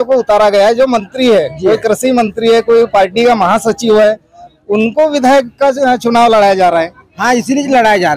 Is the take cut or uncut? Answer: uncut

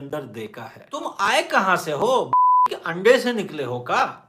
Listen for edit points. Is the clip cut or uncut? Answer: cut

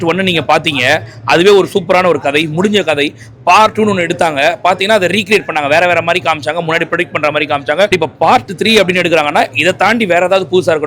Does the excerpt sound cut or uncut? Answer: cut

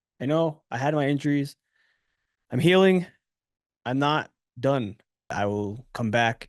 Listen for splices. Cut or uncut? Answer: cut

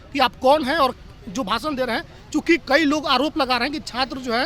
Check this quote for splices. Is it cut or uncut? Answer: uncut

